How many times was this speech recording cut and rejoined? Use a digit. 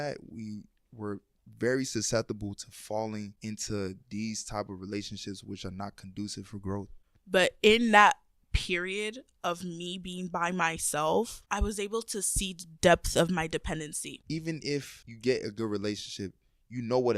2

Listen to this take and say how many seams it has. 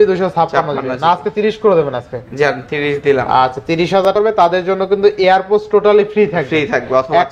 1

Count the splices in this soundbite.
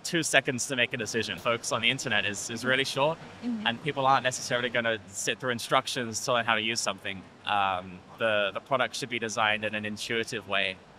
1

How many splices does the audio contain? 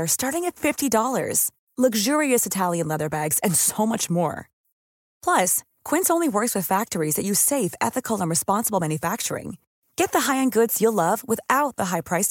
0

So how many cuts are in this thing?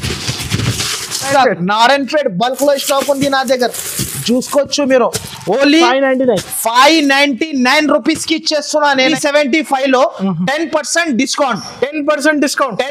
2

